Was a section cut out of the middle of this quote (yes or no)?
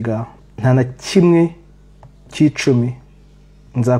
no